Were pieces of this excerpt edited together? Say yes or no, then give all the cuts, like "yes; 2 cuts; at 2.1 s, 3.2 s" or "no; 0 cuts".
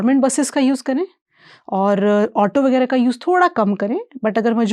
no; 0 cuts